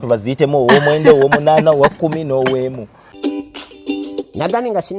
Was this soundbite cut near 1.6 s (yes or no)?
no